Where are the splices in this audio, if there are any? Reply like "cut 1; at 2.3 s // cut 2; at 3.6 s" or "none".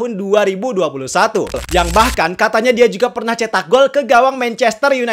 cut 1; at 1.6 s